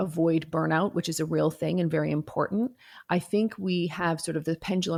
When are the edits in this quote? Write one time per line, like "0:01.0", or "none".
none

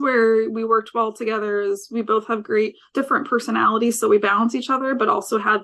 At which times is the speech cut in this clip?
0:02.8

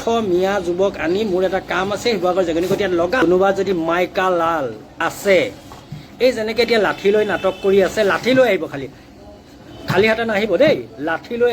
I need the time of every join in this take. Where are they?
0:03.2
0:04.9

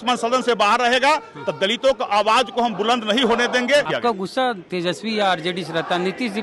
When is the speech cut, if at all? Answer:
0:03.9

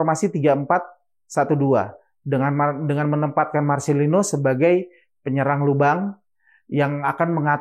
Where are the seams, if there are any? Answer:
none

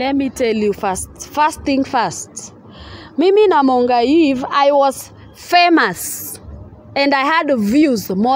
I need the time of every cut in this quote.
none

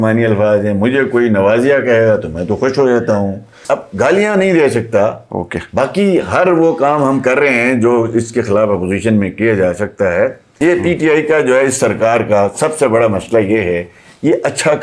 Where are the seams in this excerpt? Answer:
0:03.5
0:10.5

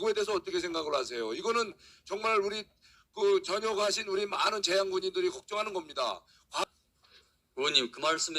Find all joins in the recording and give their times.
0:06.6

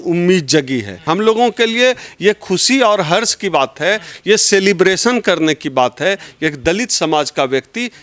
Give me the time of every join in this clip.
0:01.0

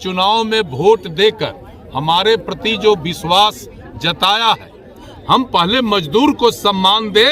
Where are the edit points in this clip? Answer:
0:05.1

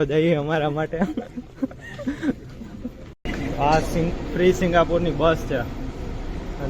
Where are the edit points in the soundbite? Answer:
0:03.2

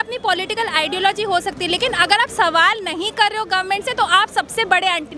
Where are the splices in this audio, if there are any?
none

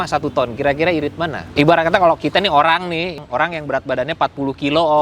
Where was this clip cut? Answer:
0:01.5
0:03.2

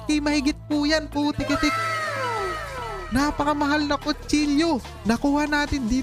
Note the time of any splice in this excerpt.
0:01.8
0:03.0
0:04.9

